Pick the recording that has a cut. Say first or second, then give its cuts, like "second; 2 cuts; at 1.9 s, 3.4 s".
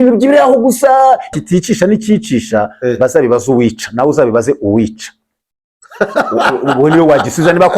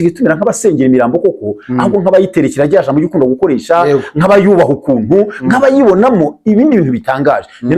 first; 1 cut; at 1.3 s